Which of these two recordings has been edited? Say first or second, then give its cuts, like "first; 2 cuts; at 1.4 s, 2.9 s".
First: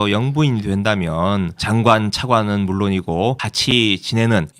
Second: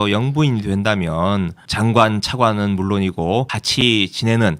first; 1 cut; at 1.6 s